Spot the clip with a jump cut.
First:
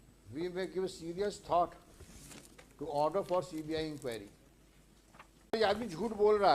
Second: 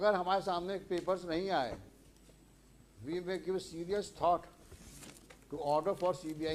first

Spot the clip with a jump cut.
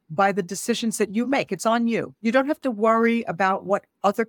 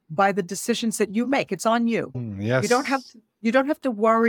first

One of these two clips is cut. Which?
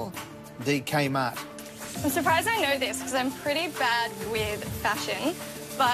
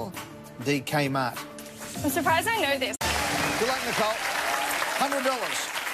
first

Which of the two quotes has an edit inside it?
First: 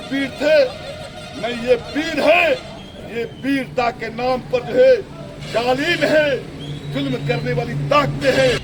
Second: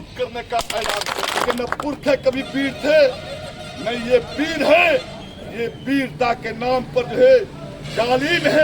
second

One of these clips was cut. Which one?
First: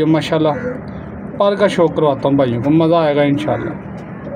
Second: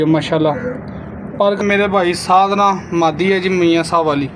second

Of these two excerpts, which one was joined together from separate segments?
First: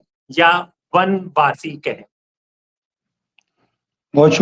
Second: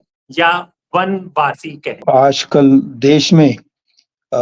second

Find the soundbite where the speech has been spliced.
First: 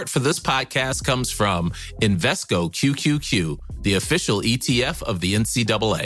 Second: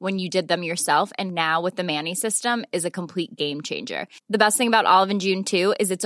first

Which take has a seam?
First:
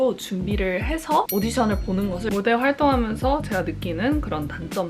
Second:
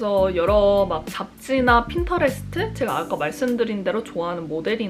first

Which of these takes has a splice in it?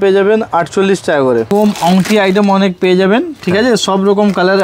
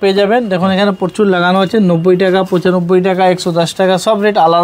first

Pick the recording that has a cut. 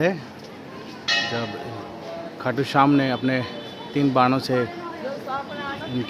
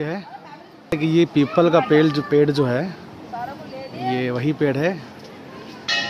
second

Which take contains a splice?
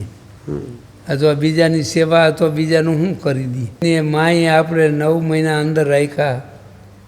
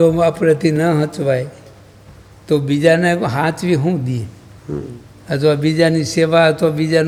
first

